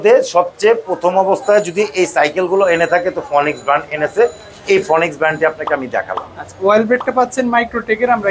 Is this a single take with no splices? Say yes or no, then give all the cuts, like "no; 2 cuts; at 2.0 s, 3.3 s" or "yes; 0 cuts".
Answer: yes; 0 cuts